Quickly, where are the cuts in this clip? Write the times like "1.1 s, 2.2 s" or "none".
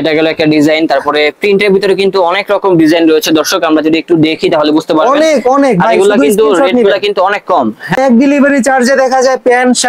8.0 s